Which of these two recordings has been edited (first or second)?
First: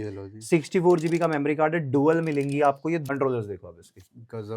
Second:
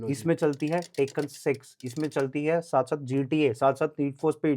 first